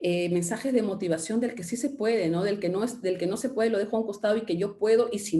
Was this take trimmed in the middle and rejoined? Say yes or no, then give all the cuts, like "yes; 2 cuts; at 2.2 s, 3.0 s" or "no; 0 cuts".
no; 0 cuts